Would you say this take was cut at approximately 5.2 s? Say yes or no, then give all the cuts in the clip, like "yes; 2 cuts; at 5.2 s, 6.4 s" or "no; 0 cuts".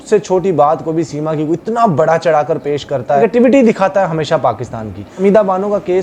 yes; 2 cuts; at 3.2 s, 5.2 s